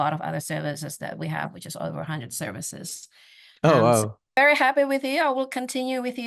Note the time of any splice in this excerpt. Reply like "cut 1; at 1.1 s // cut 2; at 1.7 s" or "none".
cut 1; at 4.3 s